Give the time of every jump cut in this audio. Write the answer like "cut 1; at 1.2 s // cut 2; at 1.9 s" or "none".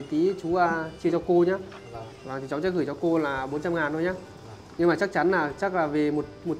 none